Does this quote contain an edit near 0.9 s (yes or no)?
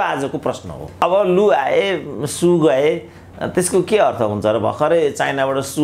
yes